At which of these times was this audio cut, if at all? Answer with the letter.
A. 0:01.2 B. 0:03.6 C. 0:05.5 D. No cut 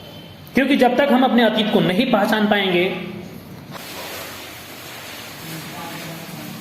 B